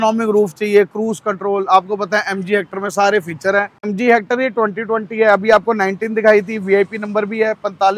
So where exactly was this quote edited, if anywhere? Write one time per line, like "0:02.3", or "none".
0:03.9